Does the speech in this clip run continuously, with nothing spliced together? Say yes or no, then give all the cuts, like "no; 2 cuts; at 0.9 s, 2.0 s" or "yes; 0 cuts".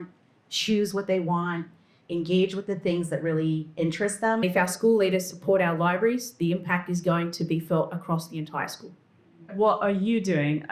no; 2 cuts; at 4.4 s, 9.5 s